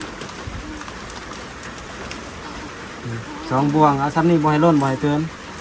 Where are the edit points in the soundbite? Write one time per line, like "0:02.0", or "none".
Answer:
none